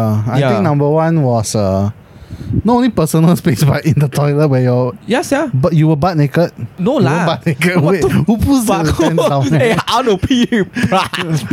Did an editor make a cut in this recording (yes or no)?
no